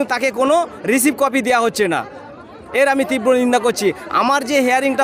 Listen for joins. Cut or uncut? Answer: uncut